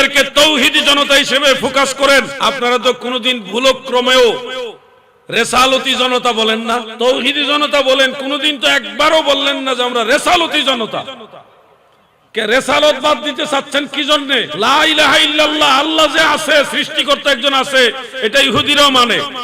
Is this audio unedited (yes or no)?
no